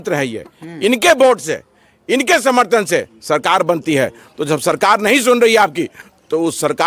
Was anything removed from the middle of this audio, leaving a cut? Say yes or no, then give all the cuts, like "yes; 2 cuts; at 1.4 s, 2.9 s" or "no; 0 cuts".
no; 0 cuts